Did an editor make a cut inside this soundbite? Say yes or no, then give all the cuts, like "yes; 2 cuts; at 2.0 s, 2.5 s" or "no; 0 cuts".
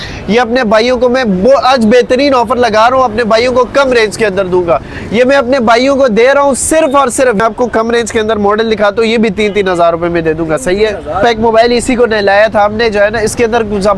yes; 2 cuts; at 7.4 s, 11.2 s